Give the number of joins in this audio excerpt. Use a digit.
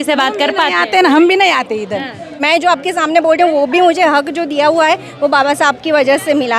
1